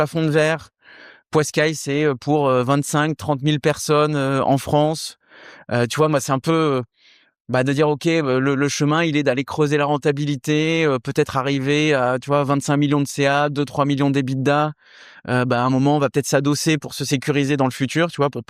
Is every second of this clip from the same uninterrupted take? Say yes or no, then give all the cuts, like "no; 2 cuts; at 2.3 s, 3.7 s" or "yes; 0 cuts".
yes; 0 cuts